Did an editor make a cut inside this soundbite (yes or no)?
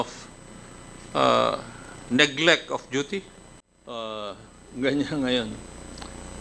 yes